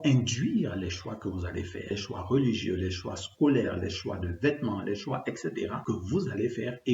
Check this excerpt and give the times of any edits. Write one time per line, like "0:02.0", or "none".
0:01.9
0:05.8

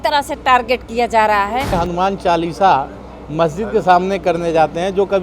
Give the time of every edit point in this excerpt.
0:01.8

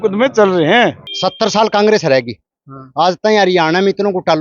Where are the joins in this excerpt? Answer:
0:01.1

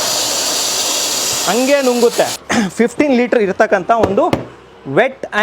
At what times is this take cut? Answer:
0:02.4

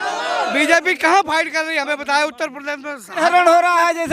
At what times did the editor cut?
0:03.2

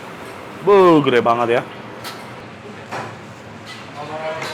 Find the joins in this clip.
0:02.4

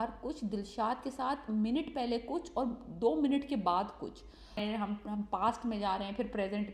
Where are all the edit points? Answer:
0:04.6

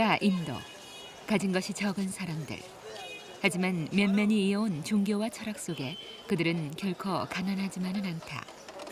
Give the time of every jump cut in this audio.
none

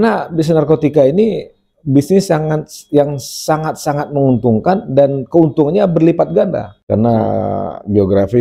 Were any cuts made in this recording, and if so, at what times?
0:06.7

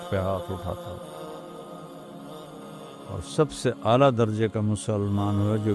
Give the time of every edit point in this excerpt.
none

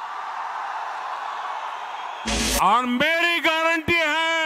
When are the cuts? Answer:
0:02.3

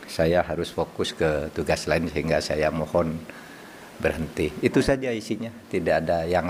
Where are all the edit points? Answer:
none

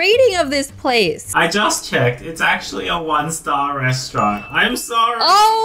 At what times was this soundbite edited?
0:01.3

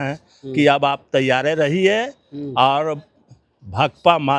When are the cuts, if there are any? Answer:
none

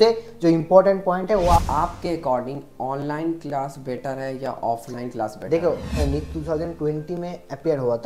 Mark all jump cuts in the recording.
0:01.6
0:05.9

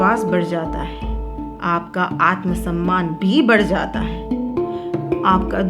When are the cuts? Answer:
0:04.5

